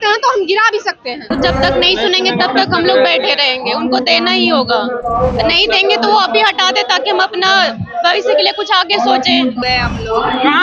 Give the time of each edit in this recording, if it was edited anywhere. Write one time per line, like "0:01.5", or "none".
0:01.3
0:09.6